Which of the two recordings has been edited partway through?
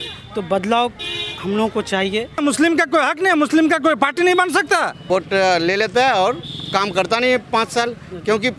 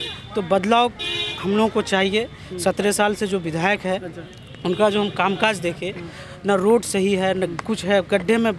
first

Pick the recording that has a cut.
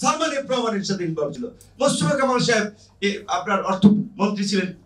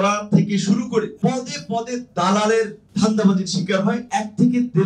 second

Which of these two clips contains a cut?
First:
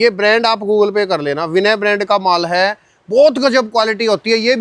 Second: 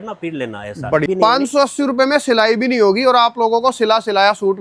second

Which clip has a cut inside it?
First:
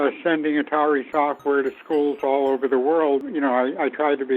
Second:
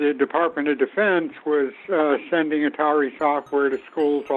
first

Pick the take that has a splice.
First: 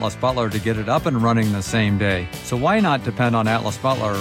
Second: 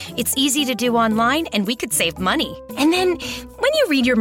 first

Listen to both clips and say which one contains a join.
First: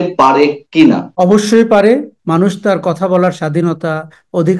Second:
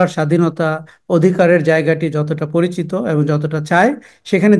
first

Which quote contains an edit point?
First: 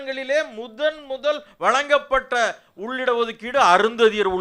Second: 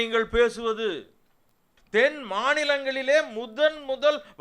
second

